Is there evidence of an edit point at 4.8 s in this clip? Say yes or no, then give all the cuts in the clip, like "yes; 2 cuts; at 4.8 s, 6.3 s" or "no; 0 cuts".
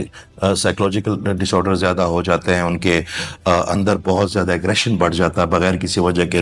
no; 0 cuts